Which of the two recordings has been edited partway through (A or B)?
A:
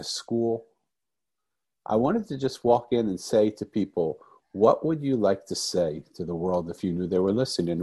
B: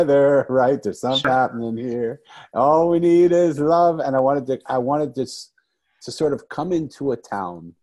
B